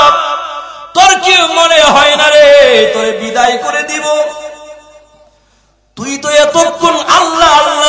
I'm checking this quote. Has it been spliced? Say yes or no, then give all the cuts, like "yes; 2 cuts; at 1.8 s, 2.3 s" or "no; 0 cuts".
no; 0 cuts